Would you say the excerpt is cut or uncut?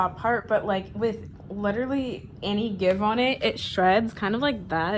uncut